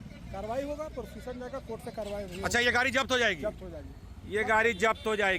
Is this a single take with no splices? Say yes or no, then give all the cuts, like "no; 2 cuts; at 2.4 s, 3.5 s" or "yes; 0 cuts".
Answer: yes; 0 cuts